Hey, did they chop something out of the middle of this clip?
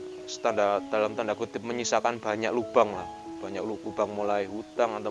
no; 0 cuts

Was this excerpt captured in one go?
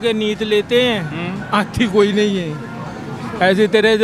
yes; 0 cuts

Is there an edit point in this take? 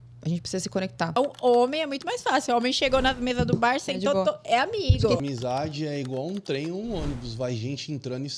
yes; 2 cuts; at 1.2 s, 5.2 s

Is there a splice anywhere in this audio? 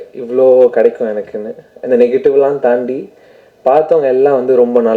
no; 0 cuts

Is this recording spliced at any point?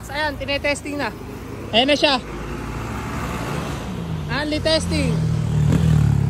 no; 0 cuts

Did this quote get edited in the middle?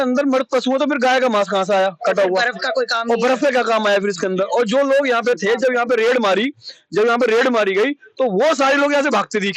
no; 0 cuts

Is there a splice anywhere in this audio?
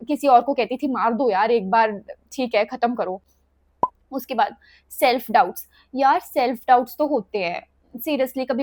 no; 0 cuts

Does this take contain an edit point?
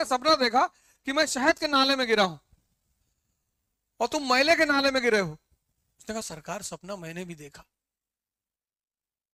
no; 0 cuts

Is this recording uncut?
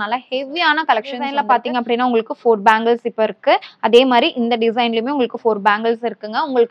no; 1 cut; at 1.2 s

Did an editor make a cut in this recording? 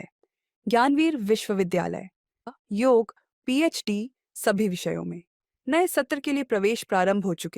yes; 1 cut; at 2.5 s

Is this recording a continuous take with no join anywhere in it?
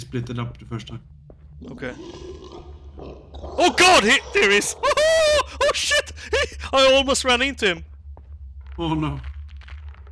yes; 0 cuts

